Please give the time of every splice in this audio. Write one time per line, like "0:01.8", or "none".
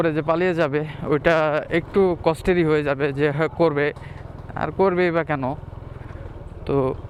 none

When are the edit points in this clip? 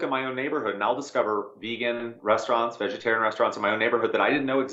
none

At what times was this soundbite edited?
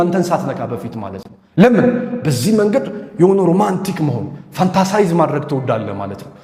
none

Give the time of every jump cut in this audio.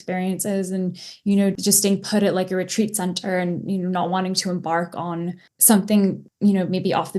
0:01.5
0:05.5
0:06.3

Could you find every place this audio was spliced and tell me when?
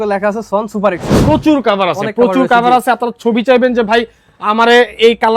0:01.1

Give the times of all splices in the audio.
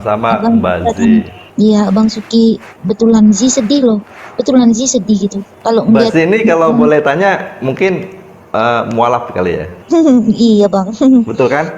0:01.4
0:05.5
0:09.7

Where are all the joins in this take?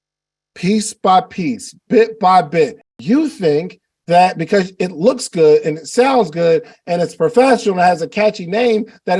0:02.9

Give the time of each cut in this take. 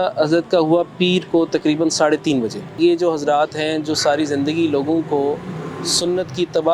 0:02.6

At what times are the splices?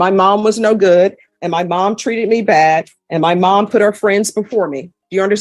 none

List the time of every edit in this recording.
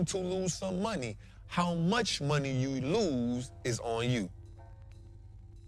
0:04.4

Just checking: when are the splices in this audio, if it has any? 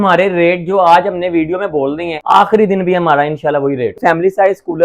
0:02.1
0:04.0

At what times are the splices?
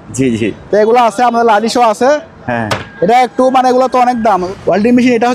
0:04.4

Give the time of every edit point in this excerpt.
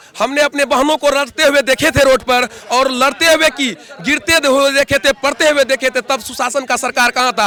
none

